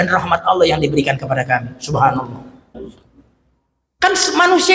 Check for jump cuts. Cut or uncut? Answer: cut